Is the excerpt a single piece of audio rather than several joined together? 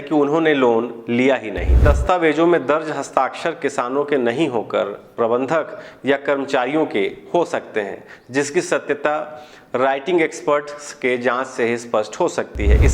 no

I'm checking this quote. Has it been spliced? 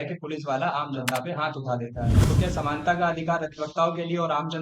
yes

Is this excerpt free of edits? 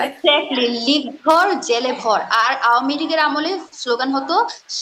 yes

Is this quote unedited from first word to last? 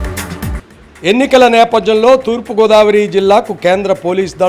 yes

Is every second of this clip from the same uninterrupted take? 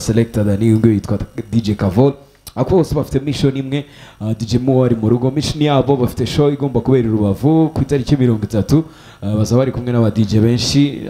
yes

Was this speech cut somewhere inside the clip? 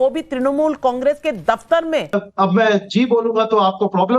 yes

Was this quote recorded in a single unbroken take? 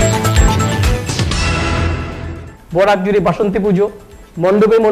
no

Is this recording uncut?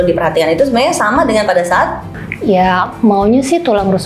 no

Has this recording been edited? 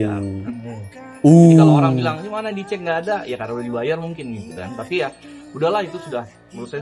no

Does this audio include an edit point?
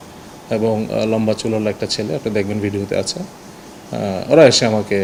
no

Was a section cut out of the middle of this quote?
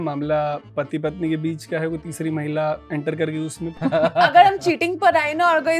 yes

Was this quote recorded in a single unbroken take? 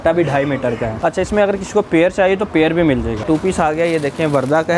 no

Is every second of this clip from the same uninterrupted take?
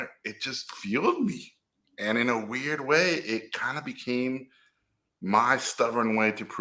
yes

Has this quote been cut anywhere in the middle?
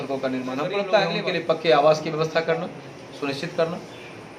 yes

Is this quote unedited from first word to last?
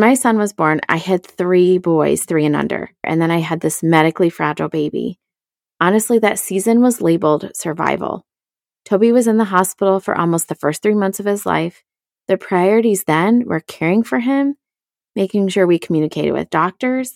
no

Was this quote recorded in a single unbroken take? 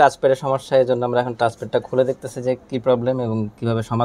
yes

